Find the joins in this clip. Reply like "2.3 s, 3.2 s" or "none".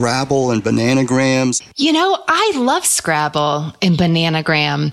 1.6 s